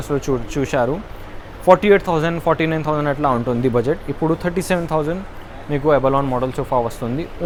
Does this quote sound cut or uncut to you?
uncut